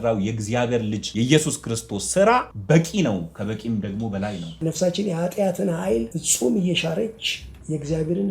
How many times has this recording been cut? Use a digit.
4